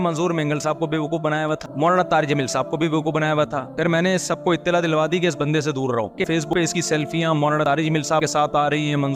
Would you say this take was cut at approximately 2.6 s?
no; 1 cut; at 6.1 s

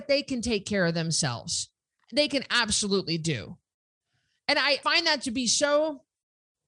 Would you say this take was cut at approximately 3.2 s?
no; 2 cuts; at 2.0 s, 4.8 s

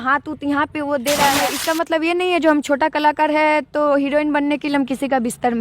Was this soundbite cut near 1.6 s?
yes; 1 cut; at 1.6 s

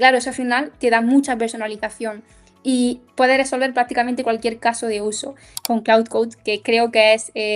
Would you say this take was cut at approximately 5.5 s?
yes; 1 cut; at 5.5 s

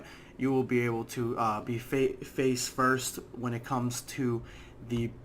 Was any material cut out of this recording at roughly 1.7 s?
yes; 1 cut; at 1.7 s

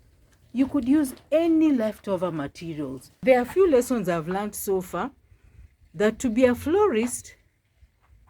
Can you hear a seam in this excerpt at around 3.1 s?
yes; 1 cut; at 3.1 s

